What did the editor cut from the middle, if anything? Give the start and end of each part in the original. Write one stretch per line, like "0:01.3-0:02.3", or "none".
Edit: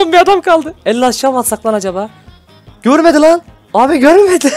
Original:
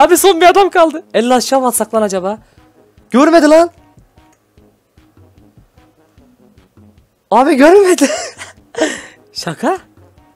0:03.8-0:07.1